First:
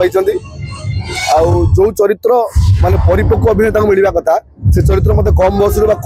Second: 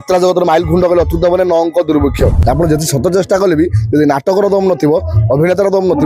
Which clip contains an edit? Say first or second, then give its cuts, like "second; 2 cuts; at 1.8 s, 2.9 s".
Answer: second; 1 cut; at 2.4 s